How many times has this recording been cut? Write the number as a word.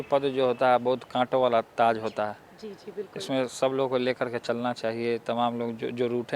zero